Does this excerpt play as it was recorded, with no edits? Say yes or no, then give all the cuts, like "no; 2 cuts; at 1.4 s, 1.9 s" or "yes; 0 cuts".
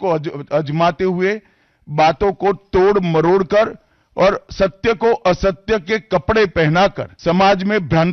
no; 1 cut; at 7.1 s